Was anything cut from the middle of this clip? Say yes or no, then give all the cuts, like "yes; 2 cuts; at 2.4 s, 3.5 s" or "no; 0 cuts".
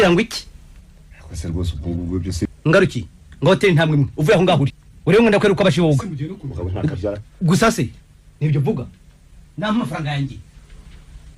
yes; 1 cut; at 2.4 s